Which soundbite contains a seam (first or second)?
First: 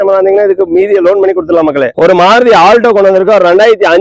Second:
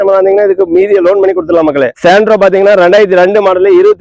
first